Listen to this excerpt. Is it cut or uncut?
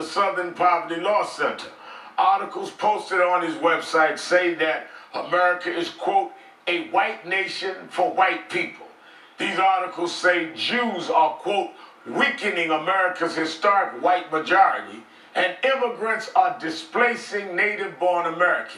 uncut